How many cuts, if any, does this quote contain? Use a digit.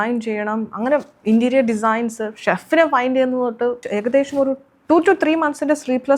1